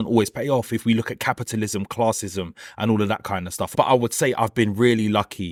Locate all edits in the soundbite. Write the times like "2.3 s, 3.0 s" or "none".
none